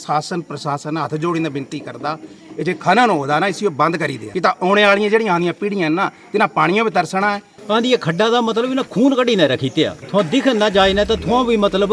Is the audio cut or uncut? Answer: cut